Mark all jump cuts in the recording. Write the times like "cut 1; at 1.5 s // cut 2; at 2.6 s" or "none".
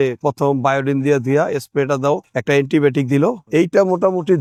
none